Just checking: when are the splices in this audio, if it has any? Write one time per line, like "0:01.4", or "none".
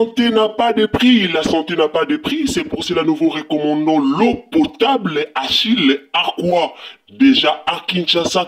none